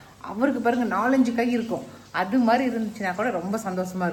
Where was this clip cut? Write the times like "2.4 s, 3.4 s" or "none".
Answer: none